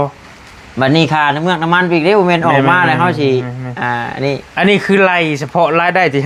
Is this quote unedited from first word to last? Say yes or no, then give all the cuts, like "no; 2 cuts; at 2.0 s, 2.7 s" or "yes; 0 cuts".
yes; 0 cuts